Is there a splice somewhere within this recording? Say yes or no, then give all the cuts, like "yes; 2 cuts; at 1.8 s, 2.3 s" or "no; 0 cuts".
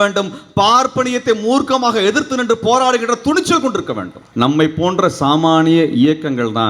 yes; 1 cut; at 4.2 s